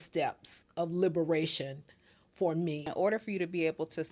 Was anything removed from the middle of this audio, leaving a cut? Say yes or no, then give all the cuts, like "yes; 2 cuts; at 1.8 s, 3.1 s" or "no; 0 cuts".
yes; 1 cut; at 2.9 s